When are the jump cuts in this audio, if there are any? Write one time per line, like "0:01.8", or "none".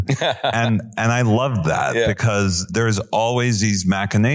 0:02.7